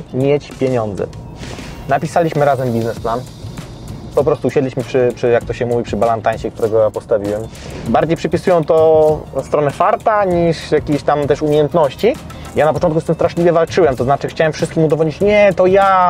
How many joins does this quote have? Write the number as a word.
two